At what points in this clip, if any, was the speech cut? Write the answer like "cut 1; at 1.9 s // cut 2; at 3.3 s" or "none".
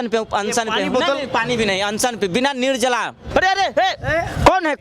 cut 1; at 3.2 s